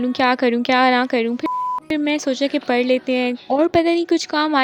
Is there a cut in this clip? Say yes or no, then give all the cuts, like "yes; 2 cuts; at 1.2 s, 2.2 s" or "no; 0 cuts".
no; 0 cuts